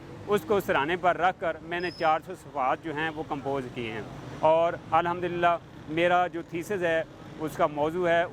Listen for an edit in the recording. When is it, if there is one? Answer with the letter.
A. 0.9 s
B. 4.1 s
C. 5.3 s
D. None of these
D